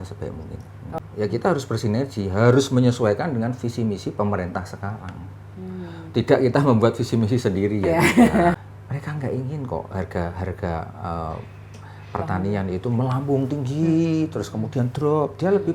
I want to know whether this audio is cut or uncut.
cut